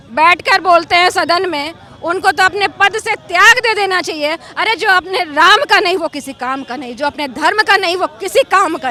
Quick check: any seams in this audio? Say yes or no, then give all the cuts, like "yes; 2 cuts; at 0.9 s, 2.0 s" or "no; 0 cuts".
no; 0 cuts